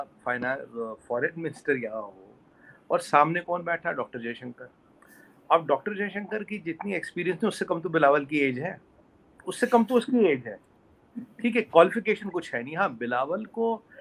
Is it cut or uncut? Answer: uncut